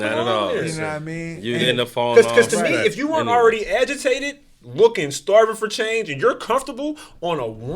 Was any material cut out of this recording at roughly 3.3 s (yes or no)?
no